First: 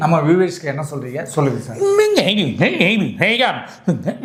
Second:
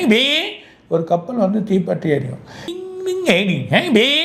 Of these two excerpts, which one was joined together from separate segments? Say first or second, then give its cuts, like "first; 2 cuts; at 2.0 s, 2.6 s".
second; 1 cut; at 2.7 s